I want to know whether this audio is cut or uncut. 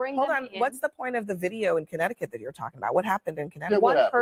uncut